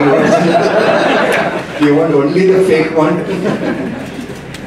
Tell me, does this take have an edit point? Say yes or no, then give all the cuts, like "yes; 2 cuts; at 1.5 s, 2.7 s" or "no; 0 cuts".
no; 0 cuts